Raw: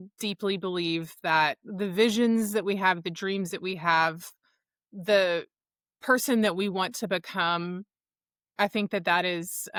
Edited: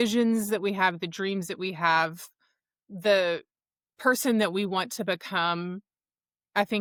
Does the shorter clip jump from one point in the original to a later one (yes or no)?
no